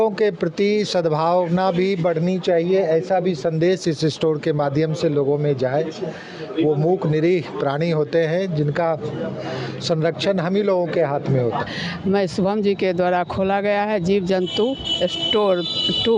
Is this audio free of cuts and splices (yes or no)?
no